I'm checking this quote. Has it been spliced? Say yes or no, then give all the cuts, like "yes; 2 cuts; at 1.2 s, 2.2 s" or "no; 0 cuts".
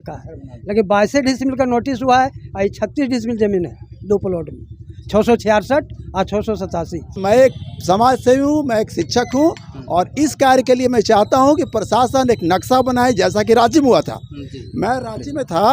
yes; 1 cut; at 7.2 s